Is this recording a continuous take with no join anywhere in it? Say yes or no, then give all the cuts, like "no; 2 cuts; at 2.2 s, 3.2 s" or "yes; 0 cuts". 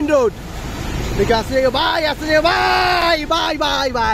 yes; 0 cuts